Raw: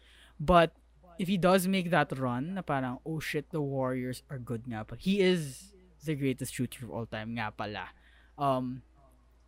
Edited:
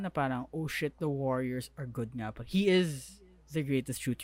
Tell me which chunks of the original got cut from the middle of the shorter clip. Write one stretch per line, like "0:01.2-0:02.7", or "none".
none

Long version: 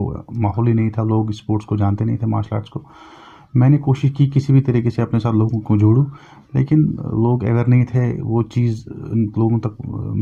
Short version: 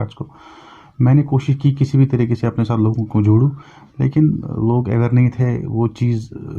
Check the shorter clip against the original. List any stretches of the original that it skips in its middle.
none

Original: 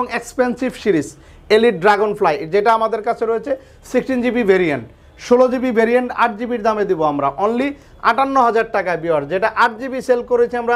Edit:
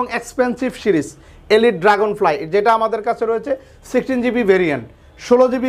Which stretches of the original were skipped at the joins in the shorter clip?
none

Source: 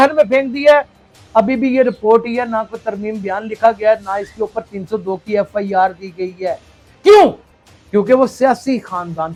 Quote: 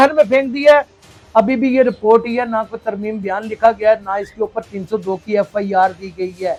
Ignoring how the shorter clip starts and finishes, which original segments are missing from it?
none

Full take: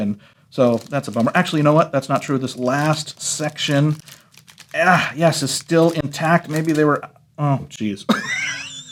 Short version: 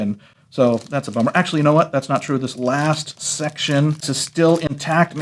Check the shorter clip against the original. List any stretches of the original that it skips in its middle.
0:04.2-0:05.5

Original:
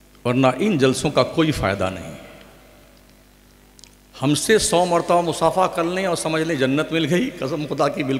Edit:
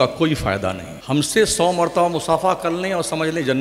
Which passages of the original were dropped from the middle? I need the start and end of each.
0:02.1-0:04.0

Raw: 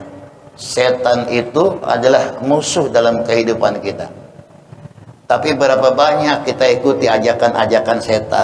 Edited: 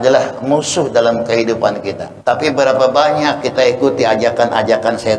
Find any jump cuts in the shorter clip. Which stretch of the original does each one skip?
0:04.0-0:05.1

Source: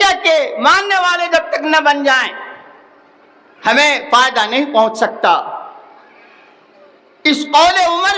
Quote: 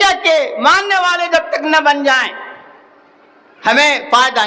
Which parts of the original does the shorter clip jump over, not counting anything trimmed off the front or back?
none

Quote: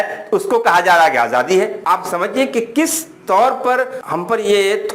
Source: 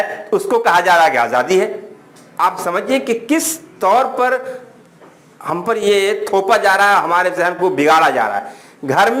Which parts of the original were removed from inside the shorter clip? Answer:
0:01.8-0:02.3
0:04.5-0:05.4

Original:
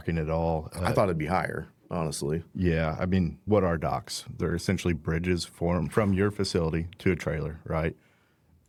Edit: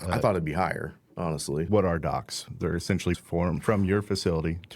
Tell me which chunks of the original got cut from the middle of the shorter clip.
0:02.4-0:03.4
0:05.0-0:05.5

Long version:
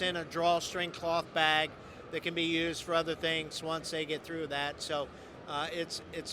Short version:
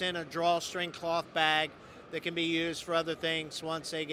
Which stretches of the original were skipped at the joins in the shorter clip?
none

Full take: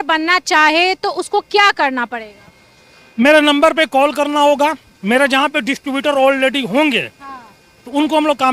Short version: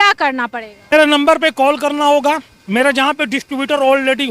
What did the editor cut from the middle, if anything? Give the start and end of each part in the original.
0:02.5-0:03.3

